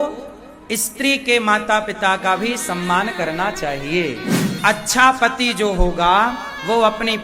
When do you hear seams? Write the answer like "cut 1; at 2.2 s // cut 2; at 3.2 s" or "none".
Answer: cut 1; at 4.5 s